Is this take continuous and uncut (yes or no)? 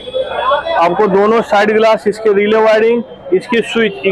yes